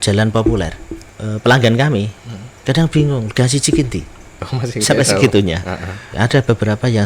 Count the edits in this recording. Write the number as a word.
two